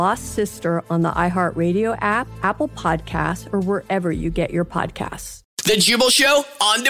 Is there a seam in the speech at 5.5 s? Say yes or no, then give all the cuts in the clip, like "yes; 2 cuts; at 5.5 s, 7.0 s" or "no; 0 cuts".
yes; 1 cut; at 5.5 s